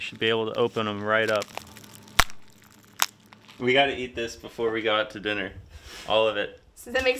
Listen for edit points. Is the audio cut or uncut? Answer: cut